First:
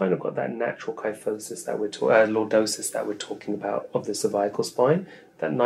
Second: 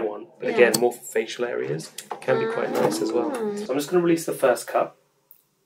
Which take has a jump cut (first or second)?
second